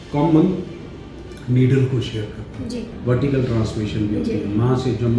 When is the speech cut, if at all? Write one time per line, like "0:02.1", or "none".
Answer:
0:02.9